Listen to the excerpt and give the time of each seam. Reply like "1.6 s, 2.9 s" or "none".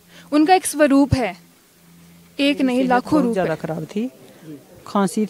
3.4 s